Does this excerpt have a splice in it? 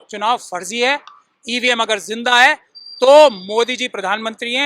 no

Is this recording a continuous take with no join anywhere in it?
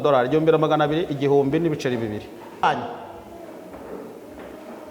no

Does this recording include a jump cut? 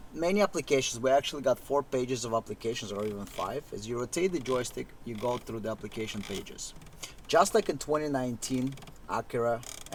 no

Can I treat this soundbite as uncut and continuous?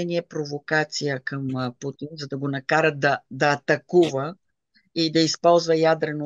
yes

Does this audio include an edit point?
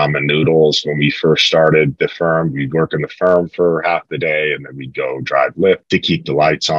yes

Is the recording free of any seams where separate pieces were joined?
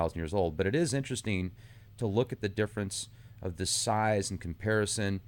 yes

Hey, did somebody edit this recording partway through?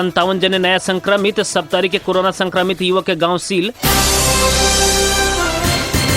no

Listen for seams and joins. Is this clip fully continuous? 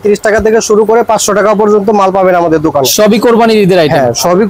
no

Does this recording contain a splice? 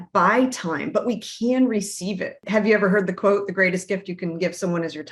yes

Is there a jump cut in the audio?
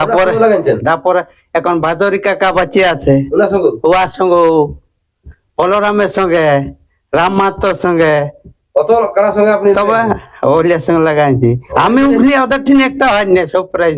yes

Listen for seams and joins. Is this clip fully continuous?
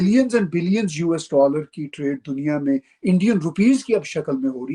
yes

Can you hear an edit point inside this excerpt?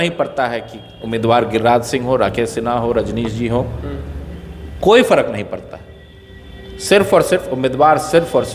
no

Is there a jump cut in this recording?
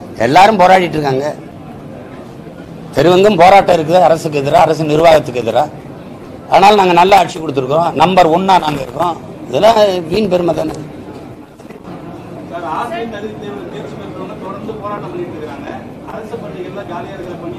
no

